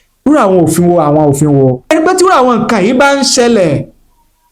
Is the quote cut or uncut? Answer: cut